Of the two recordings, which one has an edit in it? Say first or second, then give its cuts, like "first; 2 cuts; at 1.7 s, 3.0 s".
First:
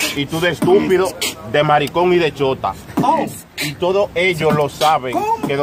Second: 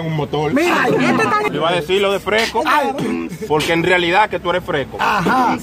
second; 1 cut; at 1.5 s